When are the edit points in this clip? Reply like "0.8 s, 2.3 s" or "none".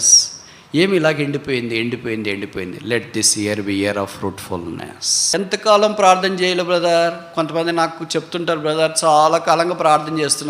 5.2 s